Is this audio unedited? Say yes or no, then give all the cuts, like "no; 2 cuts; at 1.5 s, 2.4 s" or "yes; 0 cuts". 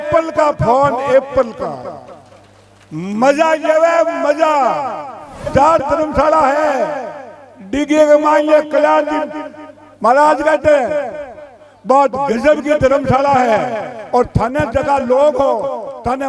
no; 1 cut; at 5.4 s